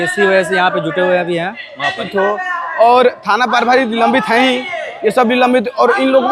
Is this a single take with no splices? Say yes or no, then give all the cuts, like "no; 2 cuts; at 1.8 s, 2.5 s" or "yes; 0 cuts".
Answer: no; 1 cut; at 2.1 s